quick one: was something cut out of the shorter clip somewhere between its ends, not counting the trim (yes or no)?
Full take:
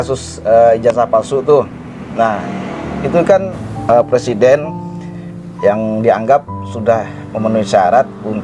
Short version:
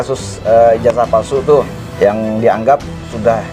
yes